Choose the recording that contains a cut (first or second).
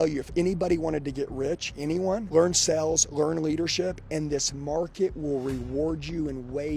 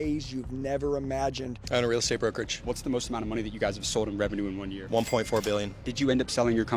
second